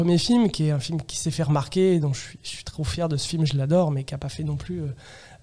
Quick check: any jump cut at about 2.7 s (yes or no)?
no